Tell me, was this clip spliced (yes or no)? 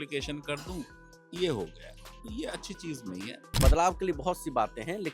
yes